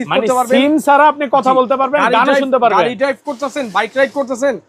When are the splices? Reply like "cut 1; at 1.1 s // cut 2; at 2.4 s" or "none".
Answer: none